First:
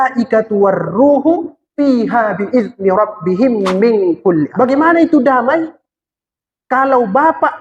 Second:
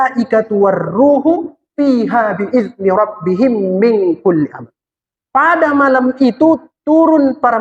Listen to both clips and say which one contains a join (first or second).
first